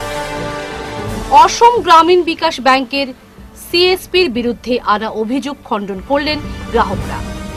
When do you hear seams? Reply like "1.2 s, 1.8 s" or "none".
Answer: 0.9 s